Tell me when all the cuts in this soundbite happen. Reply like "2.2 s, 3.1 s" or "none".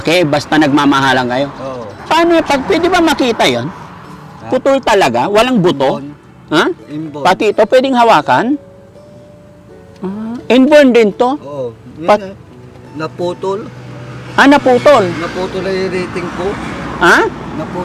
1.9 s